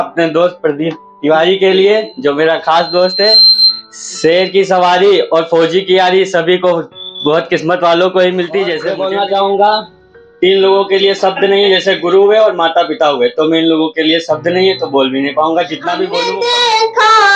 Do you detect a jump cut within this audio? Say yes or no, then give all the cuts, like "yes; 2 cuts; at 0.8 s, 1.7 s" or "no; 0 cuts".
yes; 2 cuts; at 8.9 s, 16.2 s